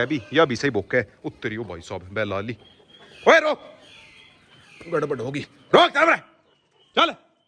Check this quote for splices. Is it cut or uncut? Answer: uncut